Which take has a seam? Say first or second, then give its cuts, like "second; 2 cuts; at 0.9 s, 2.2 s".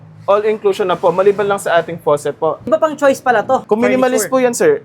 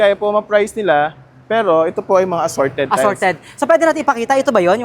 first; 2 cuts; at 2.7 s, 3.6 s